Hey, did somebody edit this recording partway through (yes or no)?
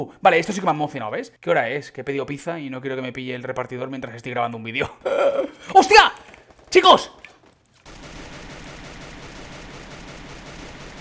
yes